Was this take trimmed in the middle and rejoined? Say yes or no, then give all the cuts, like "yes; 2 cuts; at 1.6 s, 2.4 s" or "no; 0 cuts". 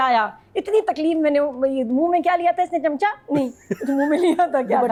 no; 0 cuts